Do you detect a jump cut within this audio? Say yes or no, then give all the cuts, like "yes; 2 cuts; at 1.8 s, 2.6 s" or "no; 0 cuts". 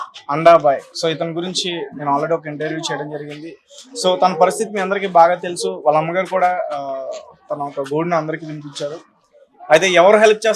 no; 0 cuts